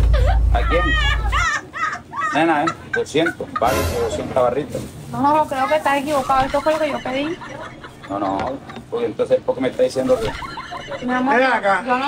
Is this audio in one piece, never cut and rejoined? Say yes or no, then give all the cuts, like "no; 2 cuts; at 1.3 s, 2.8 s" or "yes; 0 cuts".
yes; 0 cuts